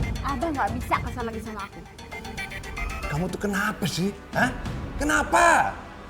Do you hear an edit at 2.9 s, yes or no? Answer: yes